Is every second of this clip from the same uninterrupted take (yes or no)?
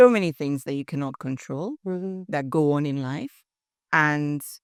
yes